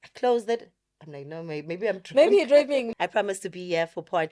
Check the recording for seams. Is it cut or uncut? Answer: cut